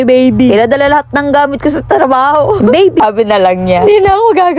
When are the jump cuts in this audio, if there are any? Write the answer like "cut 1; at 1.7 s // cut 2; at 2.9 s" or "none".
cut 1; at 3.0 s

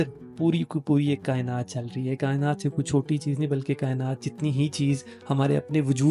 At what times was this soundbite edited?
none

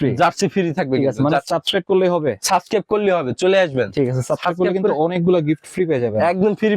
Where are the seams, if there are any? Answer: none

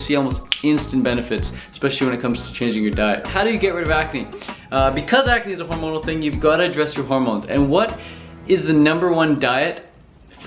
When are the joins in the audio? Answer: cut 1; at 3.3 s

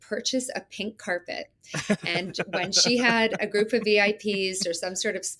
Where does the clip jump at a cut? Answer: none

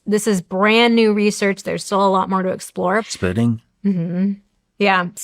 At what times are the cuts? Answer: cut 1; at 3.0 s

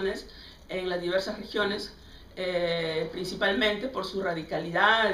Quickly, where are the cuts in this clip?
cut 1; at 3.9 s

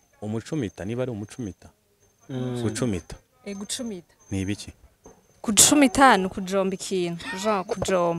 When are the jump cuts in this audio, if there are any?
none

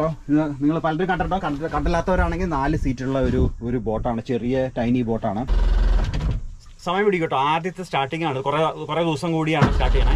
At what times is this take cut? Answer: cut 1; at 5.6 s

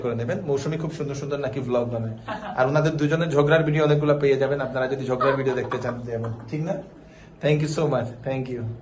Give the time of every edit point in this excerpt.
none

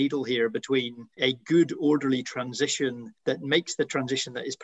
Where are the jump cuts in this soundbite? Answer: cut 1; at 1.0 s // cut 2; at 3.1 s

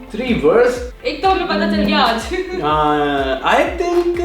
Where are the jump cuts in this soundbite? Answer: cut 1; at 0.9 s

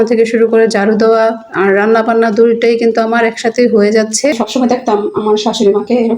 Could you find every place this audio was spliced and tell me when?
cut 1; at 4.4 s

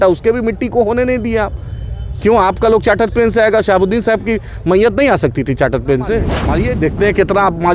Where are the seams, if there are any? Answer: cut 1; at 6.4 s

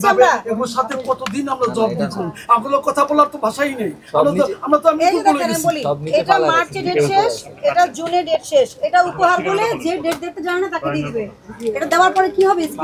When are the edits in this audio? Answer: none

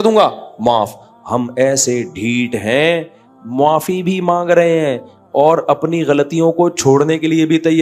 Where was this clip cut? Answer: none

